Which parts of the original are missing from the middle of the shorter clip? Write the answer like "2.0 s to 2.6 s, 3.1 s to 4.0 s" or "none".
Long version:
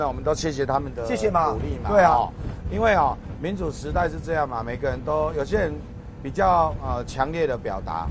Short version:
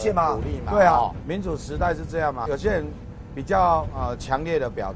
2.4 s to 3.3 s, 4.6 s to 5.3 s